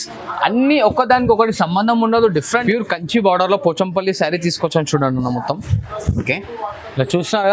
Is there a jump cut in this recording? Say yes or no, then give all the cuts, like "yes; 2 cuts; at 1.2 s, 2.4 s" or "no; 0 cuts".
yes; 1 cut; at 2.6 s